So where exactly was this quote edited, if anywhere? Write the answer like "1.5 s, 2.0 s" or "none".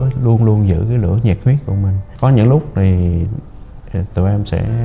2.0 s